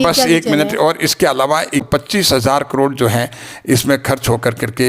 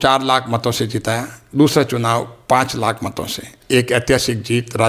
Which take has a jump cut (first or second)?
first